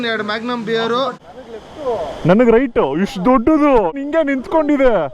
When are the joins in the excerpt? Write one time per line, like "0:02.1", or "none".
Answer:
0:01.3
0:04.0